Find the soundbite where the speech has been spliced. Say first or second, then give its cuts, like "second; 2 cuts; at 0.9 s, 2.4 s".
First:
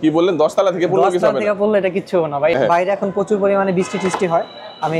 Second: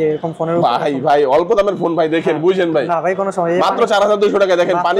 first; 1 cut; at 2.5 s